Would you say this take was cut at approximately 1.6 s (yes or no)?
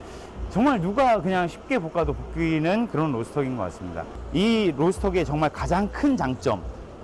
no